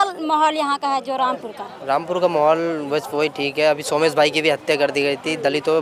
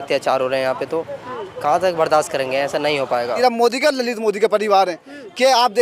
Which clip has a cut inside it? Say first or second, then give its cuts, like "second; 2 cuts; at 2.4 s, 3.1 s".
second; 1 cut; at 3.4 s